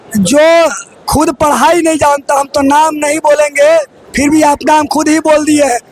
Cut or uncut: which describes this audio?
uncut